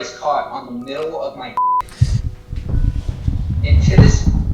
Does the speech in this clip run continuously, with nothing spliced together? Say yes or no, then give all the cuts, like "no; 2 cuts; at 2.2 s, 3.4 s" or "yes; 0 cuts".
yes; 0 cuts